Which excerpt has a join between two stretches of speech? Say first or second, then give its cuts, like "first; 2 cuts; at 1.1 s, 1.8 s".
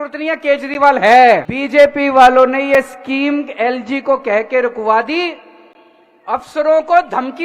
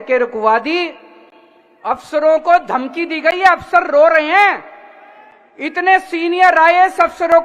first; 1 cut; at 1.6 s